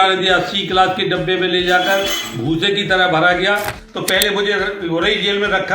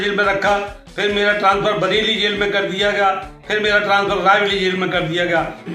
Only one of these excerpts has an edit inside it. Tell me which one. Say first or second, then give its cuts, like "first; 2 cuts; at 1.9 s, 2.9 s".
first; 1 cut; at 3.8 s